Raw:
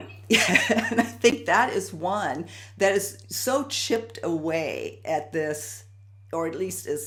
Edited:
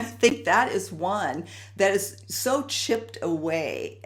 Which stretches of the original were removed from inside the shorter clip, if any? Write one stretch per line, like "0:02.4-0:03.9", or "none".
none

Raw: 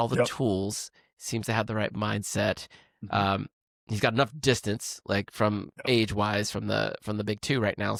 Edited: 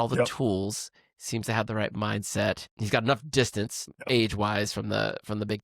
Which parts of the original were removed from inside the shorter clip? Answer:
0:02.7-0:03.8
0:05.0-0:05.7

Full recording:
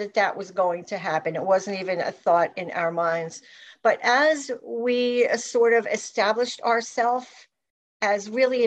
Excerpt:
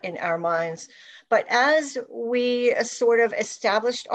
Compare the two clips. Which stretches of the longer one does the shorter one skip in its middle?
none

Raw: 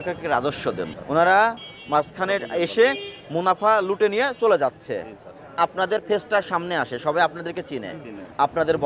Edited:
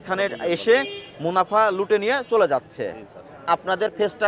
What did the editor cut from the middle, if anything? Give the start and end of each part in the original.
none

